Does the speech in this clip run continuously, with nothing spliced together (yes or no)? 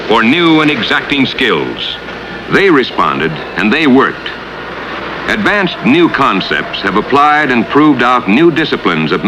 yes